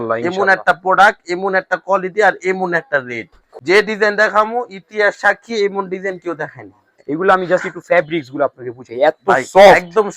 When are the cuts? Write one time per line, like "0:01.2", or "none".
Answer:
0:03.5
0:06.9